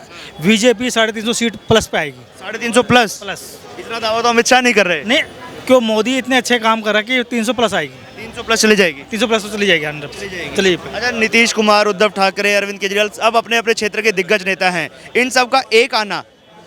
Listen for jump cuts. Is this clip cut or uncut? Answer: uncut